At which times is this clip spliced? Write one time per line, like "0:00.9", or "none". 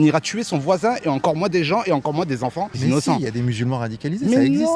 0:02.8